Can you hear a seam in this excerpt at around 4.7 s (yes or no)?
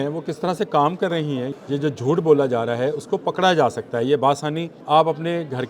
yes